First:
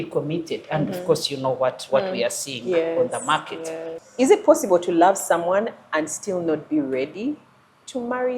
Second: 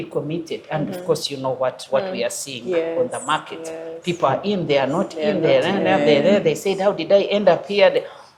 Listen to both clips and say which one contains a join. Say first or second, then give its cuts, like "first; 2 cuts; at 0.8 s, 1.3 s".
first; 1 cut; at 3.9 s